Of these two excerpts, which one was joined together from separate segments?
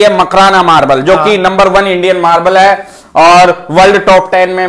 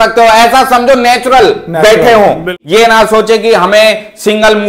second; 1 cut; at 2.5 s

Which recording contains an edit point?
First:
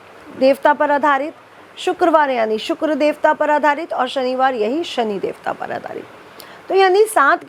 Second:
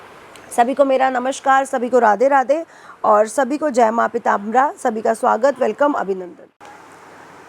second; 1 cut; at 6.3 s

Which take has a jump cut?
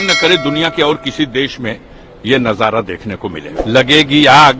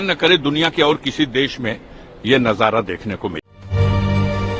first; 1 cut; at 3.5 s

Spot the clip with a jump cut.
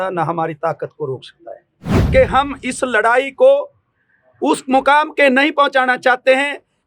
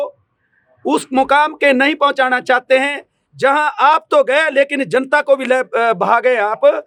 first; 1 cut; at 1.9 s

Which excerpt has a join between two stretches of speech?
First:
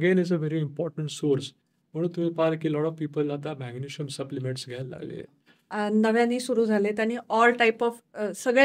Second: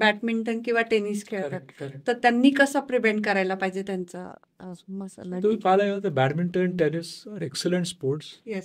first; 1 cut; at 5.5 s

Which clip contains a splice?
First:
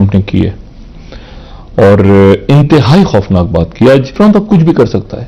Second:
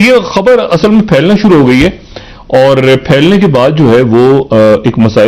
first; 1 cut; at 4.1 s

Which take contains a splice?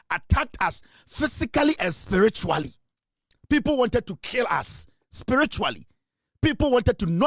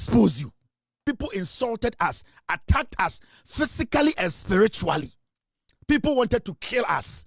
second; 1 cut; at 1.0 s

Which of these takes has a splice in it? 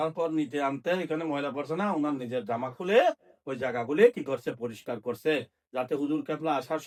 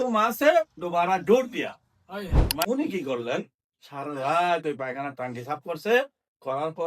second; 1 cut; at 2.6 s

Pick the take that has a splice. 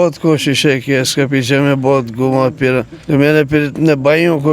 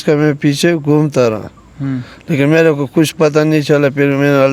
first; 1 cut; at 2.9 s

